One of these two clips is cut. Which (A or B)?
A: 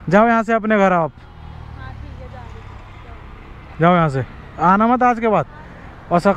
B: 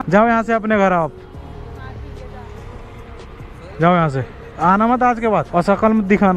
B